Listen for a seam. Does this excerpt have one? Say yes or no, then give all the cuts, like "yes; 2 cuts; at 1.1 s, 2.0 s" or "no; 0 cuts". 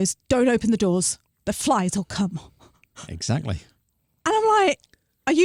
no; 0 cuts